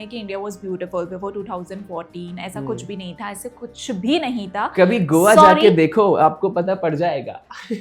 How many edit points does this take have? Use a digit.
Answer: 0